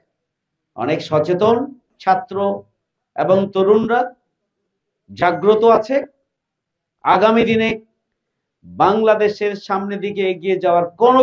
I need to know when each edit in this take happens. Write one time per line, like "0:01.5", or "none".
0:01.9